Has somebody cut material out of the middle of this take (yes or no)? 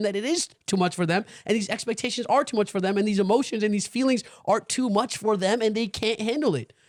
no